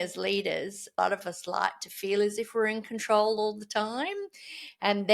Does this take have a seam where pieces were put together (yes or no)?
yes